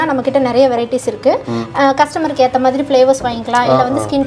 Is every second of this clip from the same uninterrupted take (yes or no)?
yes